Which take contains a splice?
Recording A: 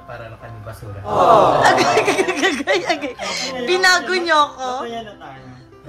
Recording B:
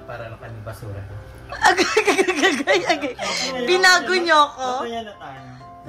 A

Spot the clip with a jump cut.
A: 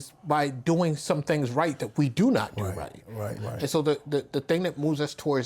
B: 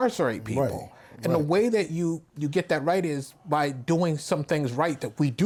A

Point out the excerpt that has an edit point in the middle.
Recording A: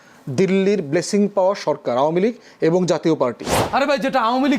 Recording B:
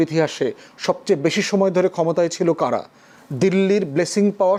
A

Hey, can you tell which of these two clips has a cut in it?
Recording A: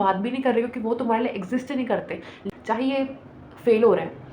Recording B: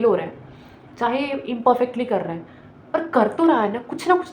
A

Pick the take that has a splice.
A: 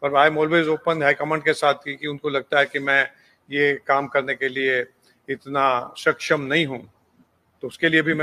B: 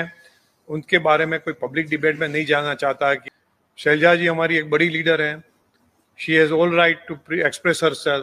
B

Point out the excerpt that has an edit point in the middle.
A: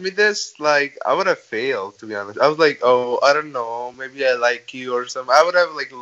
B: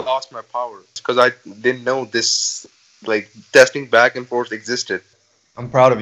B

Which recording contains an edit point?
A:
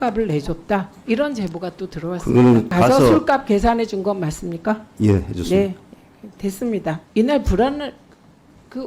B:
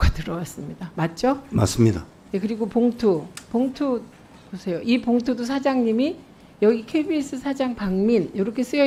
A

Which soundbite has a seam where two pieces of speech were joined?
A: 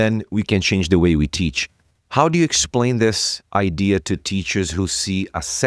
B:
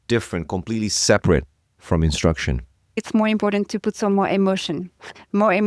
B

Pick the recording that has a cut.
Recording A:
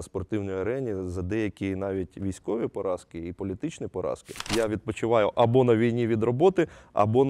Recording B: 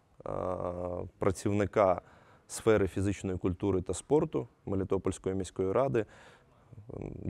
A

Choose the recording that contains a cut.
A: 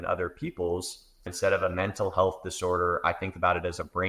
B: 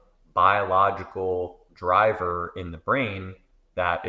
A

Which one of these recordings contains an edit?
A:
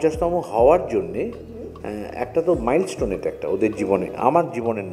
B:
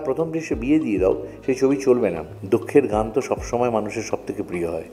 B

